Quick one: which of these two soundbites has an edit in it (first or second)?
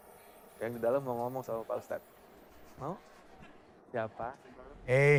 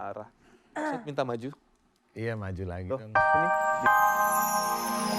second